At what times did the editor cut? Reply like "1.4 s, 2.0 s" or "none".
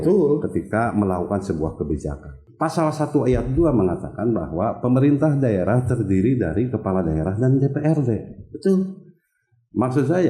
2.4 s